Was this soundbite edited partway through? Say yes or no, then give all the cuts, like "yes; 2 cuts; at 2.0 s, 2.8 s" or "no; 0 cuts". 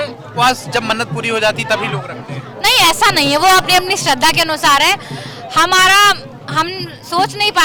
no; 0 cuts